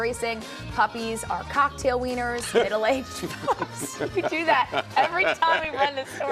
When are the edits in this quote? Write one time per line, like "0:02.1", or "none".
none